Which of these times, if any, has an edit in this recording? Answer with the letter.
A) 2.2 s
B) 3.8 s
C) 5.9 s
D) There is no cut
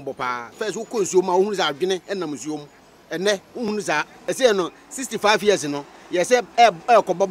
B